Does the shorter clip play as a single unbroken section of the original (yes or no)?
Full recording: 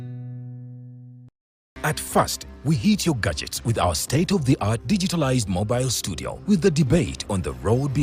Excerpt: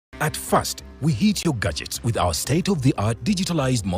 yes